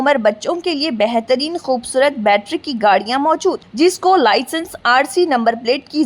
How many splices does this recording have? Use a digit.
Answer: 0